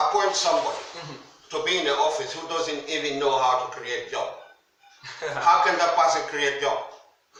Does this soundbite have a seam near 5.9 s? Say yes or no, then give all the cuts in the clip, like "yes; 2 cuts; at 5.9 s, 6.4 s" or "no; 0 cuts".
no; 0 cuts